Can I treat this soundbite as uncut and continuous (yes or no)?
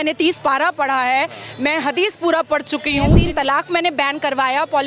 no